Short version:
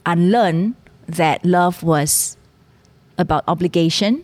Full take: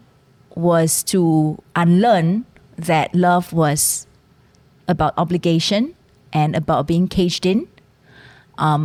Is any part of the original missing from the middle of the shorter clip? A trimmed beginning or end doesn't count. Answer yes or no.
no